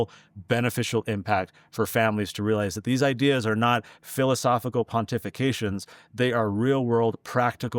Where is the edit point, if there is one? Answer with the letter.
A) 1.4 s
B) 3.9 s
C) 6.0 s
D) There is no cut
D